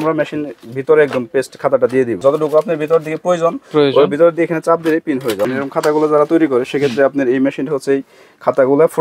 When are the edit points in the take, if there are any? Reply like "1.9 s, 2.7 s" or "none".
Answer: 2.2 s, 5.4 s